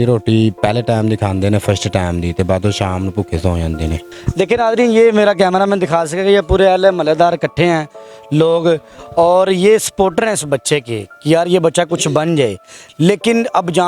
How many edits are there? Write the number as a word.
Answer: one